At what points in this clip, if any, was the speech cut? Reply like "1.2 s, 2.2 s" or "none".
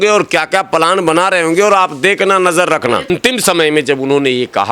3.1 s